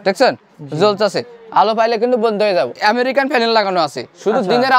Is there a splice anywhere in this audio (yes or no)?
yes